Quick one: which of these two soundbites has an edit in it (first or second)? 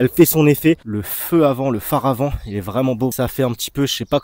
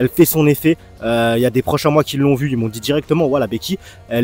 first